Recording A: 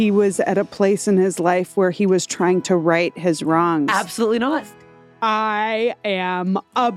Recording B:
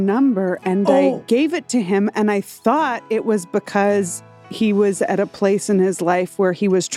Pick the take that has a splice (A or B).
A